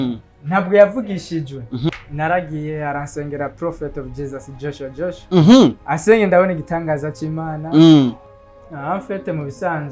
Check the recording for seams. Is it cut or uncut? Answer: cut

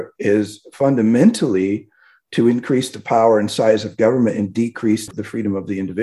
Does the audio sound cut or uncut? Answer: cut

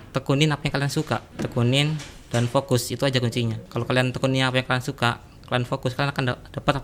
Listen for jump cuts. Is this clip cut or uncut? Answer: cut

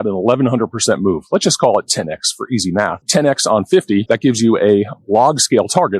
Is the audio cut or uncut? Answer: cut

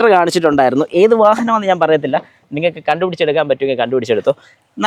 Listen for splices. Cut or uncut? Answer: uncut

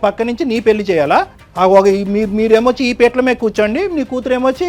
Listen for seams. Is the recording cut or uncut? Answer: cut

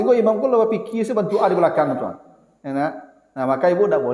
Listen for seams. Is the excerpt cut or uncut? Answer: uncut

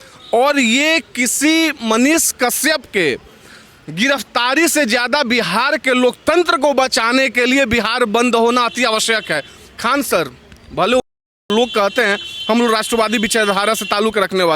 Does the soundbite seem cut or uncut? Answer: uncut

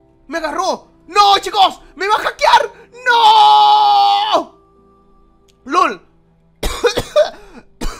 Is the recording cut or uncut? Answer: uncut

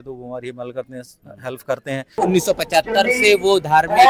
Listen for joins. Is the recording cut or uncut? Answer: cut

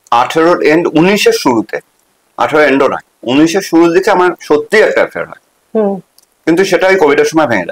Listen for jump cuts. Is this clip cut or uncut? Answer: uncut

